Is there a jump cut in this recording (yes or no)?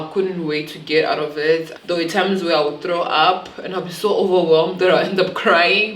yes